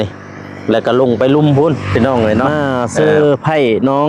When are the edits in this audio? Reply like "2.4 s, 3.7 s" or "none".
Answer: 2.5 s